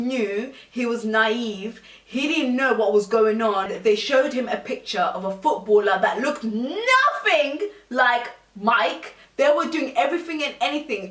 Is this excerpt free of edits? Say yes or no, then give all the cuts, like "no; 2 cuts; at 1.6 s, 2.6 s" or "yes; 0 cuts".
no; 2 cuts; at 3.7 s, 9.3 s